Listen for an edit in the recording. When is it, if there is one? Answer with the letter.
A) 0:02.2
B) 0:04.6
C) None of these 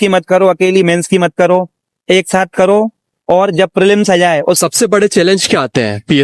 B